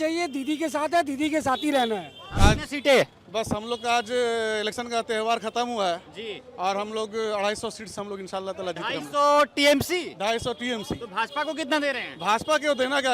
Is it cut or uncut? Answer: cut